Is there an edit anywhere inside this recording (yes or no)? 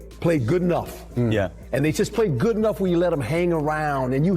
no